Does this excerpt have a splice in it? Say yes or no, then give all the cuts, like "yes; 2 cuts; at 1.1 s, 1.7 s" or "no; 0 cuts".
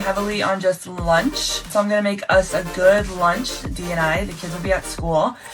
yes; 1 cut; at 1.7 s